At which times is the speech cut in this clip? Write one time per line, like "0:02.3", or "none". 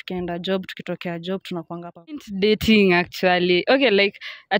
0:02.2